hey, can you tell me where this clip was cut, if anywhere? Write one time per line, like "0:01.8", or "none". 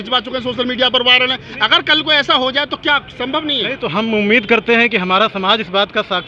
none